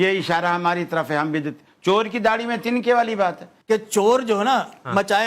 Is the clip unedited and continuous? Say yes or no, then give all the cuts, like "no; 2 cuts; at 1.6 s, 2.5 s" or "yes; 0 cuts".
no; 1 cut; at 3.5 s